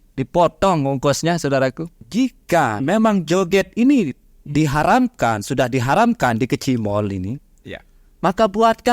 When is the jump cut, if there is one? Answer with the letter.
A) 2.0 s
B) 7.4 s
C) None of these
A